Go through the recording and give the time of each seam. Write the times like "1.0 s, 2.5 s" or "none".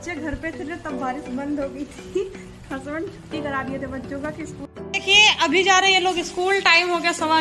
4.6 s